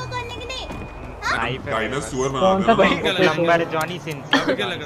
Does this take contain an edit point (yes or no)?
yes